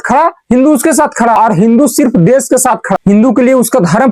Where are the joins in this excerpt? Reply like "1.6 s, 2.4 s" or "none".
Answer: none